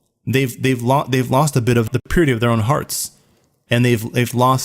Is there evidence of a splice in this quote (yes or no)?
yes